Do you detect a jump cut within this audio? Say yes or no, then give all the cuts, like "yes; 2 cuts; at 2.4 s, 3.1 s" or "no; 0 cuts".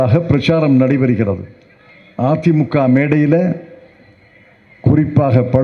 no; 0 cuts